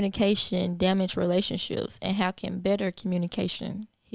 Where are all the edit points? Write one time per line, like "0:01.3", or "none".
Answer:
none

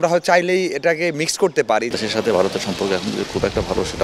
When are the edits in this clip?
0:01.9

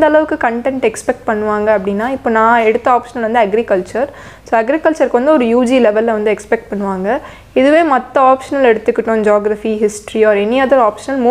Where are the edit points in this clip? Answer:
none

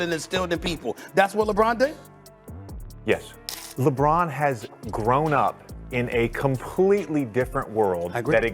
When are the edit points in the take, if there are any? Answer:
0:03.4

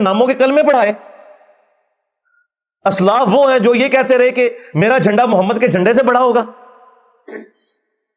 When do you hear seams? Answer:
none

